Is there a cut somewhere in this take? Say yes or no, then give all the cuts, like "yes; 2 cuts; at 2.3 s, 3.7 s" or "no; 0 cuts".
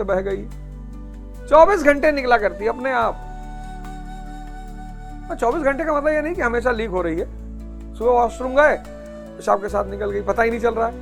no; 0 cuts